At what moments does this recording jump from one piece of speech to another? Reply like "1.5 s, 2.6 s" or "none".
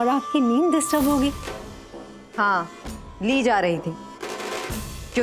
1.4 s